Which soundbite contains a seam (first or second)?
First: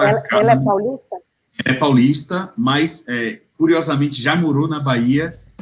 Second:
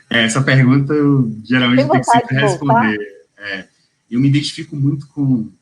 second